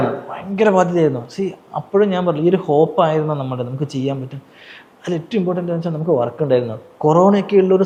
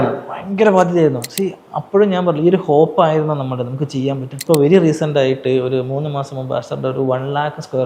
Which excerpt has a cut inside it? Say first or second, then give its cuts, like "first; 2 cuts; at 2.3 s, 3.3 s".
second; 1 cut; at 4.4 s